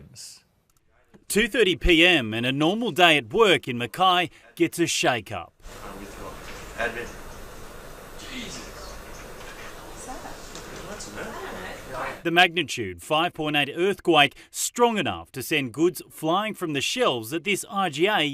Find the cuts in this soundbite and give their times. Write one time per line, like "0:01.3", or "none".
0:06.7